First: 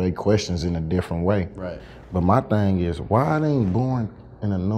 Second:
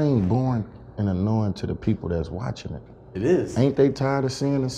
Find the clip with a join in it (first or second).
first